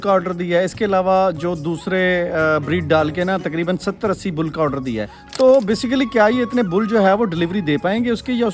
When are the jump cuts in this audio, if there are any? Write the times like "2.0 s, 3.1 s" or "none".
5.2 s